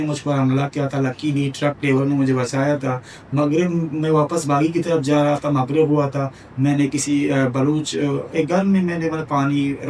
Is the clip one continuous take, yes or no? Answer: yes